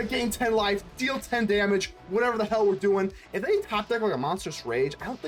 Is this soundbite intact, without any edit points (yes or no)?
yes